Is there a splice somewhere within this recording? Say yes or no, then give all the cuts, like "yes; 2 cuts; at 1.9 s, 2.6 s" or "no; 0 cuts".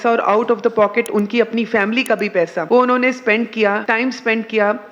yes; 2 cuts; at 2.6 s, 3.8 s